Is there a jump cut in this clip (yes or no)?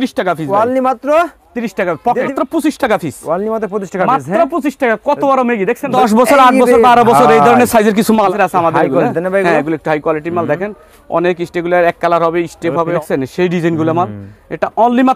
yes